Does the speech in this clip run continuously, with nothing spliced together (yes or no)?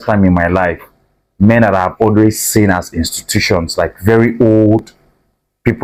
yes